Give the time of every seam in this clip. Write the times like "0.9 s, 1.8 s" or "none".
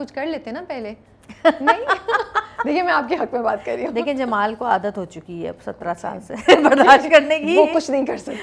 none